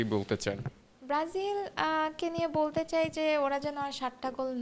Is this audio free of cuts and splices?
yes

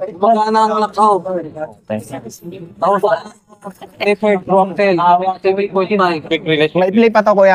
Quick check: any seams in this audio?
no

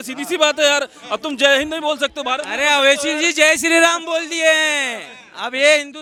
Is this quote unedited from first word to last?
yes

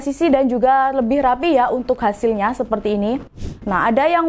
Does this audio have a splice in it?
yes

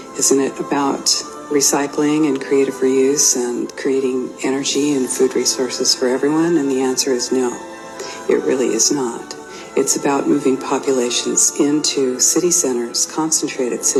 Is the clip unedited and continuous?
yes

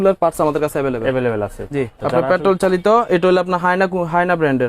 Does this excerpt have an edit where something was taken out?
yes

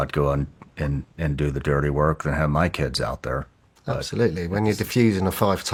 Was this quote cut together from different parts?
no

